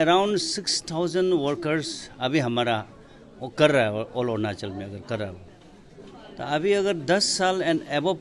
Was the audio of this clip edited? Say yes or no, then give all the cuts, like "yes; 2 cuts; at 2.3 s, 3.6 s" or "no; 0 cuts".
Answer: no; 0 cuts